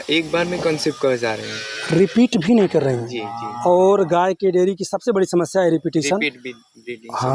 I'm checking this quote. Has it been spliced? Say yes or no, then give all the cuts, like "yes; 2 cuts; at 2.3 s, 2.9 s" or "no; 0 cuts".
no; 0 cuts